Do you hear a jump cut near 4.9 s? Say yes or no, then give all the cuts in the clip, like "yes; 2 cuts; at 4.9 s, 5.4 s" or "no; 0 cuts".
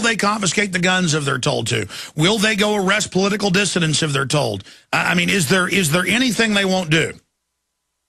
no; 1 cut; at 2.8 s